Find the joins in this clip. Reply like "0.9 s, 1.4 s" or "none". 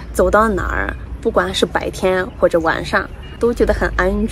3.2 s